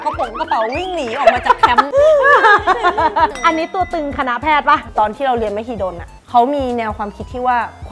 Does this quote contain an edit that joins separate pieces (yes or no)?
yes